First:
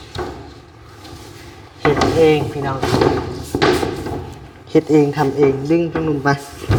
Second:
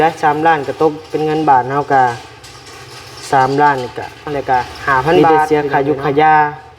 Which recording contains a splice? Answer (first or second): second